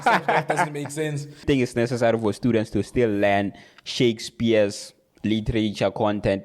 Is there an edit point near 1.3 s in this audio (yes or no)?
yes